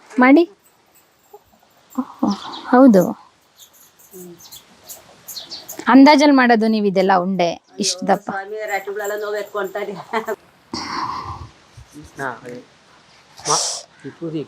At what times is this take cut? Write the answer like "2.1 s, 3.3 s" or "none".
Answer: 10.4 s